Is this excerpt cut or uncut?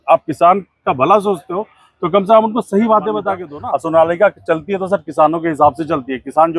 cut